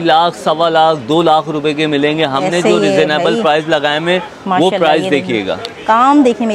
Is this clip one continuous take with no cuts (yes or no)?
yes